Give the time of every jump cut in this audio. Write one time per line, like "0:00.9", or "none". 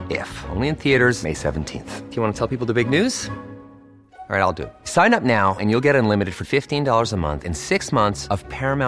none